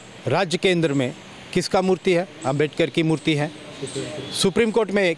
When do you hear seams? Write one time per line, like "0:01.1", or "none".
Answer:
none

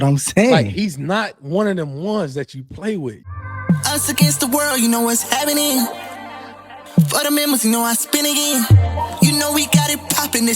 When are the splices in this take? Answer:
0:03.3

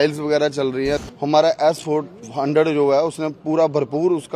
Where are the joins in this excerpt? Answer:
0:01.0

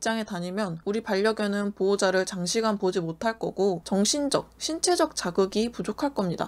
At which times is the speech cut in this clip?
0:03.8

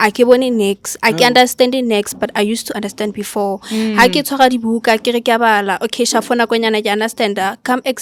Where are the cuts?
none

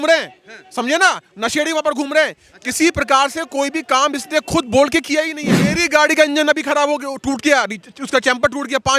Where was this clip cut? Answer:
0:05.6

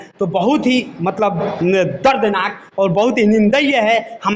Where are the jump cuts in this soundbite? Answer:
none

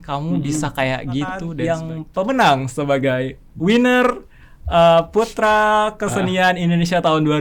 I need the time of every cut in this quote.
0:01.5

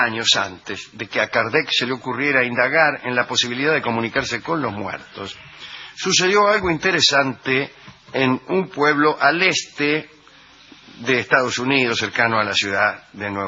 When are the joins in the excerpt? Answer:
0:10.5

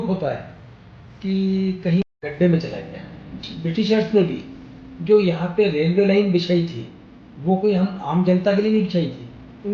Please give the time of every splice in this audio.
0:03.5

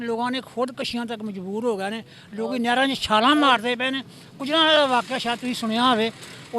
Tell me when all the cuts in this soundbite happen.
none

